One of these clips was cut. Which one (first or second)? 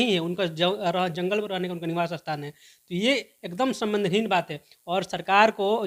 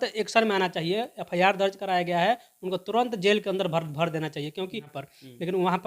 second